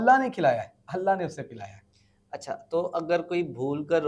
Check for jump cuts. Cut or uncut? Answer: uncut